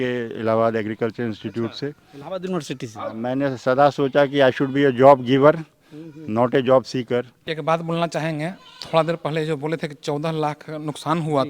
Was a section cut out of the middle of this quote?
yes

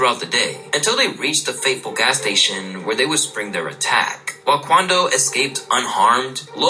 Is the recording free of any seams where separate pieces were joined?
yes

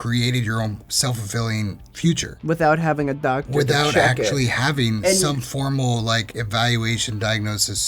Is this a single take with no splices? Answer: no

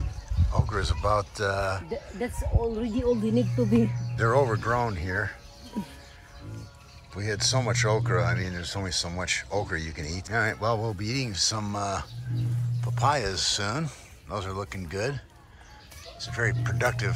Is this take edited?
no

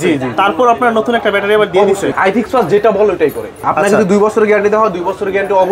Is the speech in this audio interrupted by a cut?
yes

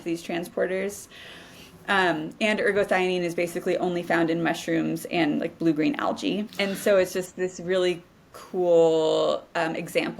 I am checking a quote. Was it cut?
yes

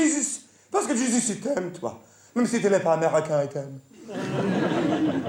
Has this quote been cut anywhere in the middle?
no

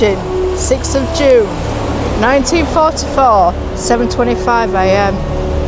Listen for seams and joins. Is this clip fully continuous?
yes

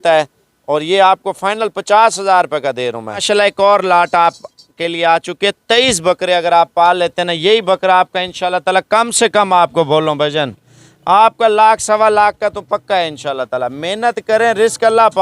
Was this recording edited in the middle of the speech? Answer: yes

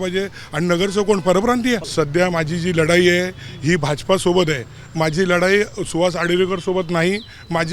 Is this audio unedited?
no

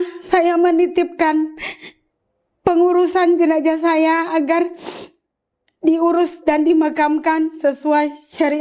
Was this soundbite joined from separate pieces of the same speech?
no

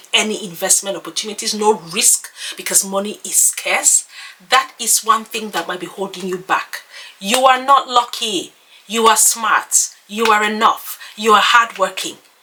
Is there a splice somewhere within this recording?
no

